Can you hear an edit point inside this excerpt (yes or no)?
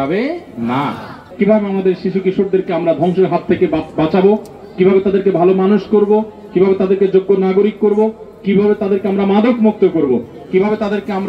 yes